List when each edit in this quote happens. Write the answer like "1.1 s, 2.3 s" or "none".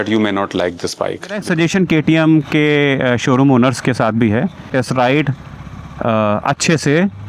1.4 s, 4.7 s

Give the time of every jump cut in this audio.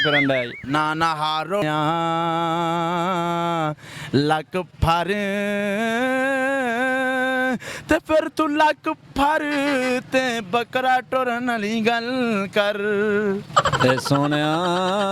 1.5 s

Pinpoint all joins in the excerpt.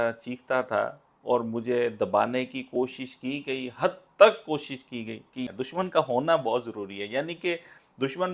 5.5 s

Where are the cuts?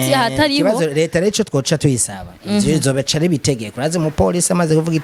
none

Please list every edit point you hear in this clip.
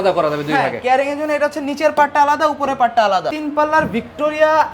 3.3 s

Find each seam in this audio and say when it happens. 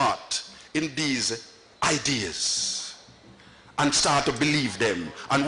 none

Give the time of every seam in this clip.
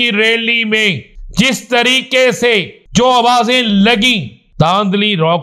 1.1 s, 2.8 s, 4.4 s

